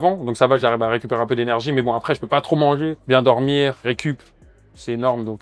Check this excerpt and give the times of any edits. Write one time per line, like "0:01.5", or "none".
0:03.0
0:03.8